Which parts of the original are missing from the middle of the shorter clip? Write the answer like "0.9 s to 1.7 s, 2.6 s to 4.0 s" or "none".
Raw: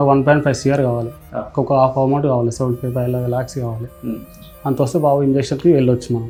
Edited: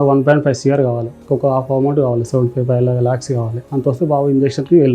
1.1 s to 1.4 s, 3.8 s to 4.5 s